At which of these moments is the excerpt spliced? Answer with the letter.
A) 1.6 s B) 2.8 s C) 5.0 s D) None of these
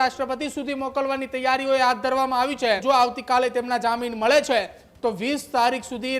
B